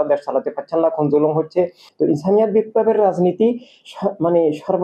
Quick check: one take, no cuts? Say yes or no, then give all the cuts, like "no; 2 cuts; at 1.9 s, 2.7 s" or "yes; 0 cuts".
no; 1 cut; at 1.8 s